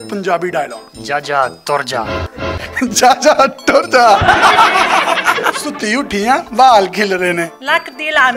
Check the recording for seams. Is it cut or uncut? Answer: uncut